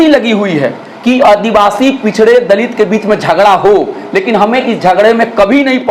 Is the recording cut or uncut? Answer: uncut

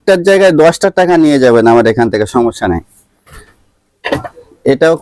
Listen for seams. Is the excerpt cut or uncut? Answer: uncut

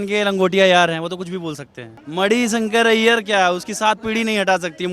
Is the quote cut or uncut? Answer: cut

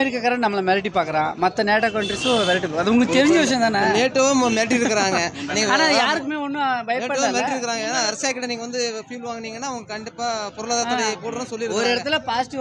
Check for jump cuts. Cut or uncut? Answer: uncut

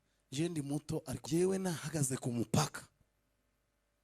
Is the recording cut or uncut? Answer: cut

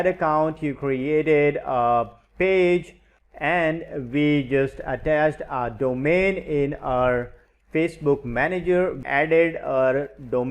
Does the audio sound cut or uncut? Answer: cut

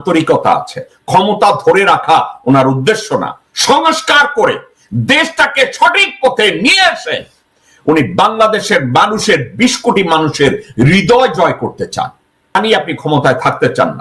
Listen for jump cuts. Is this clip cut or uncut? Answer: cut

